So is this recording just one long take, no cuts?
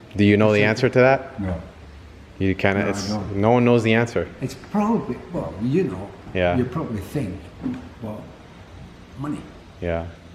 yes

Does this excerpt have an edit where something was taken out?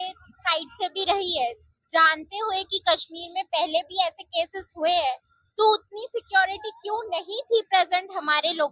no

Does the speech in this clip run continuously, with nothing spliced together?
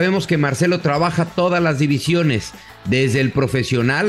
yes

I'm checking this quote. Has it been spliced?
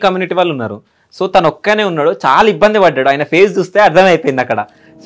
no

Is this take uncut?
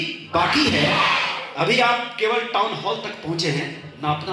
yes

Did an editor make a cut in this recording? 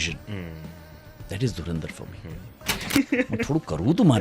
yes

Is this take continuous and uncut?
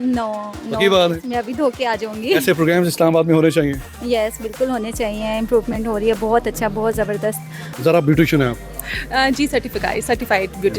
yes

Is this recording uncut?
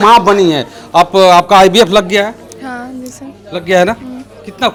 yes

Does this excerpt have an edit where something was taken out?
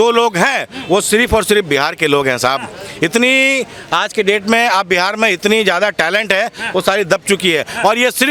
no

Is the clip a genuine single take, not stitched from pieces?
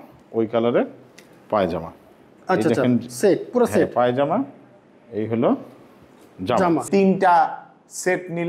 no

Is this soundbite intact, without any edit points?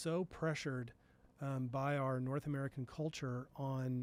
yes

